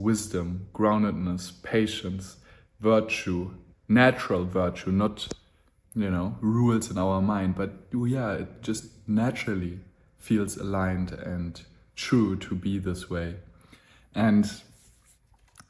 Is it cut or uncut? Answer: uncut